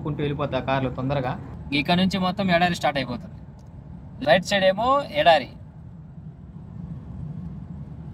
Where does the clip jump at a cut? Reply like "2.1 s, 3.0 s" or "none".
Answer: 1.5 s, 4.0 s